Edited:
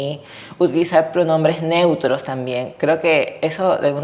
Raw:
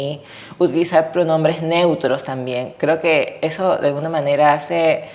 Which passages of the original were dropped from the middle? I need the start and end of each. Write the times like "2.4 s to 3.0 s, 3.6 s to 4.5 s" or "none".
none